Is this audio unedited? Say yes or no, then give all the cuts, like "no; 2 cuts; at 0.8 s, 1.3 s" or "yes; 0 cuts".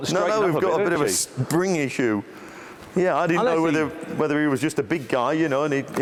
yes; 0 cuts